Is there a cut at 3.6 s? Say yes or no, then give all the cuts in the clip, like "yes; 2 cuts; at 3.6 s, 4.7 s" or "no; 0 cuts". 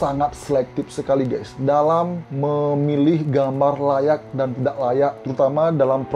no; 2 cuts; at 2.2 s, 5.2 s